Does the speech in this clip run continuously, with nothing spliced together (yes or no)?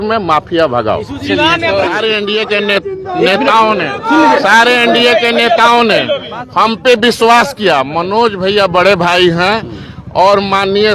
no